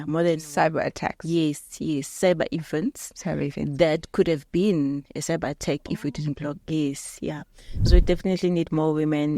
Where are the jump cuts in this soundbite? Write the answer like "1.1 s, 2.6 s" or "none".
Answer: 7.9 s